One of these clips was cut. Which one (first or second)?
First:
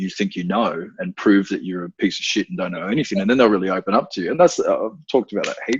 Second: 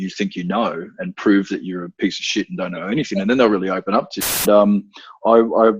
second